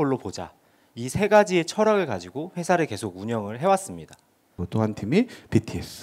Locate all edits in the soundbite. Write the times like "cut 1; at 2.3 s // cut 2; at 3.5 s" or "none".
cut 1; at 4.6 s